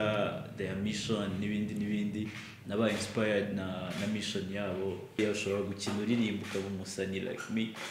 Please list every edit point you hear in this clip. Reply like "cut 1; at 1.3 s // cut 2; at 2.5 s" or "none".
cut 1; at 5.2 s